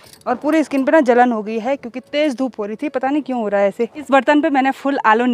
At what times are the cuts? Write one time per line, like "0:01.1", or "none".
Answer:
0:04.0